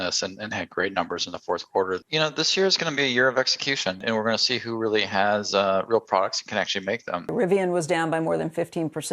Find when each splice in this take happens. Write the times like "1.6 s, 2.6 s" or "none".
2.0 s, 4.0 s, 7.3 s

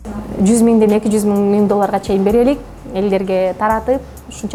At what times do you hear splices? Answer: none

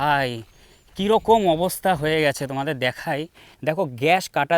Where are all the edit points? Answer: 3.4 s

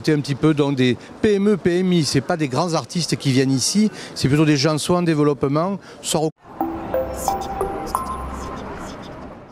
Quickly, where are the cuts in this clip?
none

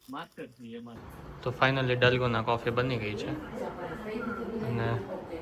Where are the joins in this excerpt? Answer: 1.0 s

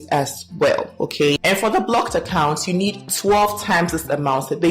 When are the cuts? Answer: 1.4 s

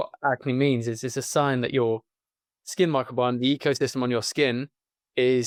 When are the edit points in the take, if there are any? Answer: none

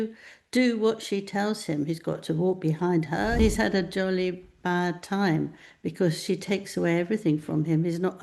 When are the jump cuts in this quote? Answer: 3.4 s

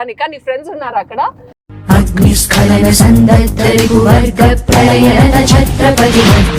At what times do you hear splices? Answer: none

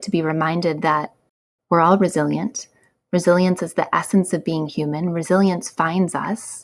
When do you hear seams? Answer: none

